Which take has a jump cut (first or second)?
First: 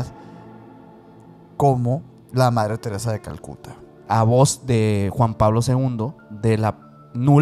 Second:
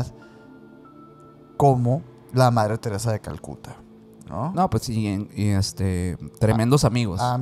first